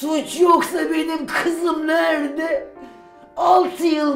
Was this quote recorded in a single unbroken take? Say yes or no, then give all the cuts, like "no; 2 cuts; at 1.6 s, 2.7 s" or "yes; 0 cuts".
yes; 0 cuts